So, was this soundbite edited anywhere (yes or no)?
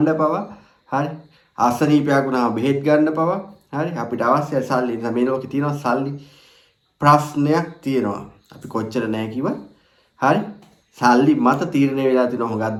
no